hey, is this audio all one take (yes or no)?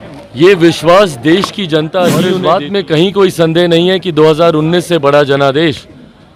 no